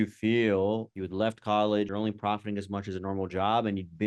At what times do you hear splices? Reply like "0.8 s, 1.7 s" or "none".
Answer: 0.9 s, 1.9 s